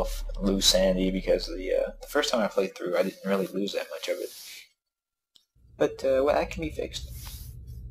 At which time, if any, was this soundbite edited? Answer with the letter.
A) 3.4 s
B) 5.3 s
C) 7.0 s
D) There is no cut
D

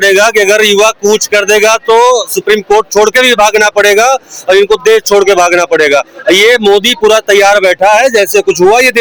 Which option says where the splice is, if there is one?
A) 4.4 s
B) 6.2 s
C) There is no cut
C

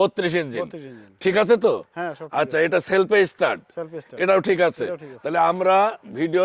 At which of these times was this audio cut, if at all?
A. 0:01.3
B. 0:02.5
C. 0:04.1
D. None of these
D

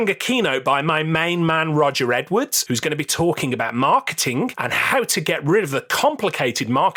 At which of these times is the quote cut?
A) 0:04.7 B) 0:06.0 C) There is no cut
C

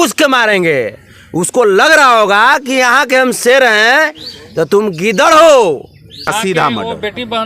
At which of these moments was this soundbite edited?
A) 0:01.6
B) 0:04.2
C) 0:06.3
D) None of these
C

